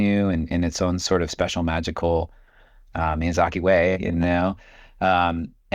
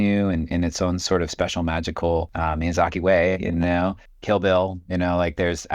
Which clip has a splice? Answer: second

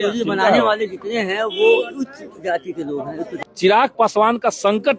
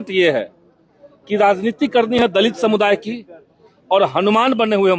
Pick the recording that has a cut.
first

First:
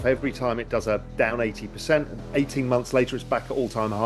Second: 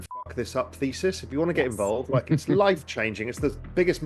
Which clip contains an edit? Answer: first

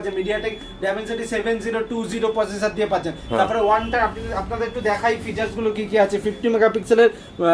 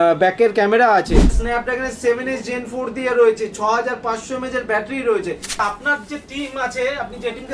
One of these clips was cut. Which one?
second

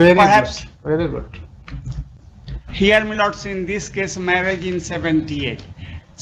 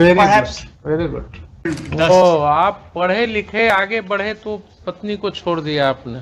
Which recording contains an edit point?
second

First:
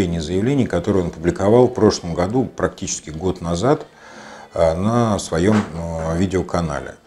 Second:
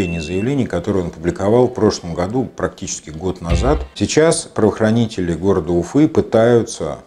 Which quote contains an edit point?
second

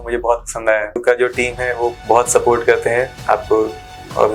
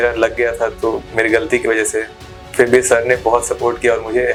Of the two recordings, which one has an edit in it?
first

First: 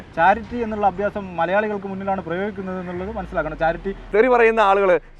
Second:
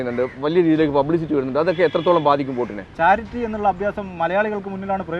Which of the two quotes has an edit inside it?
first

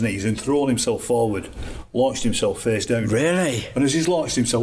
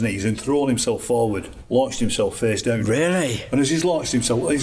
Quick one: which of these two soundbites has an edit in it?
second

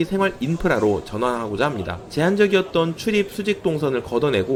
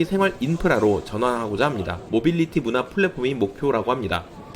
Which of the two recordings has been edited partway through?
second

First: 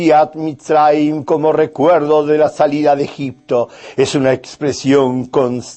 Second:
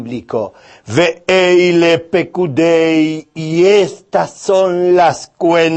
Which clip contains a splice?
second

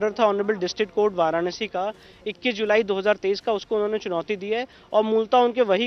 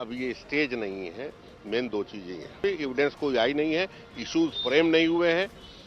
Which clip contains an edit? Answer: second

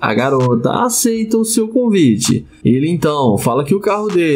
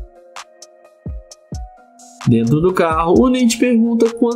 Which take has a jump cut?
second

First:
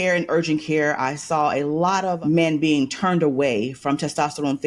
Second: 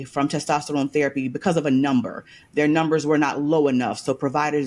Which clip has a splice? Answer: first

